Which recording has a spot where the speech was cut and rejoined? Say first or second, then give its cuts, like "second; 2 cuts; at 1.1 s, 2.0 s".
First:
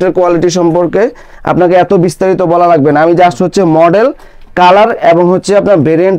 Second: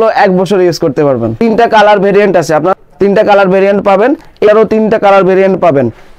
second; 3 cuts; at 1.3 s, 2.8 s, 4.5 s